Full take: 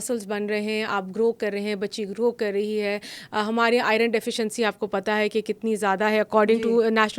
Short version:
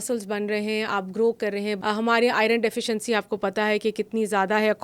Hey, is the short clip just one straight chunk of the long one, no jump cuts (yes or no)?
no